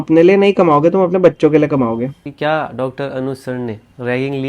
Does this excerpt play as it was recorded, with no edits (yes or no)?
no